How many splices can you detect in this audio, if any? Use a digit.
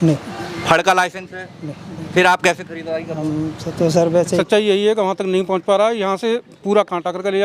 1